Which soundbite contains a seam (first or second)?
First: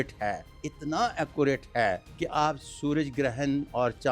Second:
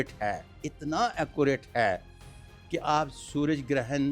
first